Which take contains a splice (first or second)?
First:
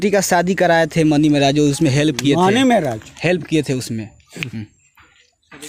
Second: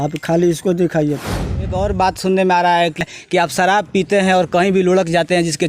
second